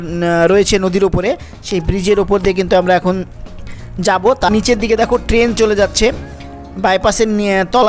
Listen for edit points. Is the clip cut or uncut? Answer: cut